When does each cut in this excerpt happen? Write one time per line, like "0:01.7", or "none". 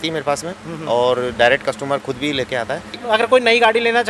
0:03.0